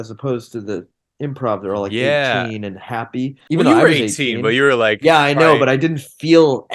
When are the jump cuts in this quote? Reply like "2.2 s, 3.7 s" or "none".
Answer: 3.4 s